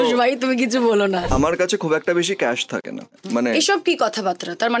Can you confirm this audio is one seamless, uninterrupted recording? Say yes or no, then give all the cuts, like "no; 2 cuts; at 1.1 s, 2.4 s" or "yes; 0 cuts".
no; 2 cuts; at 1.3 s, 3.2 s